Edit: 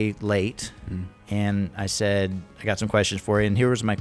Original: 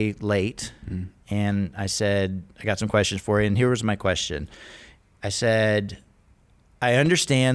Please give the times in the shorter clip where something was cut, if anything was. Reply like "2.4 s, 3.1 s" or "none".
none